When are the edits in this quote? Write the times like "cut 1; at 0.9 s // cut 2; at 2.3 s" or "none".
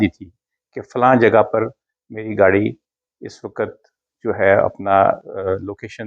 none